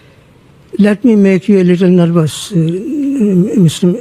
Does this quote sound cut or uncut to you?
uncut